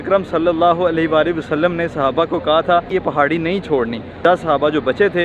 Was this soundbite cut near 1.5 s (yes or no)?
no